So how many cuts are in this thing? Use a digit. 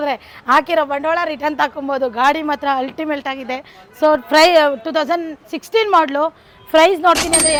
0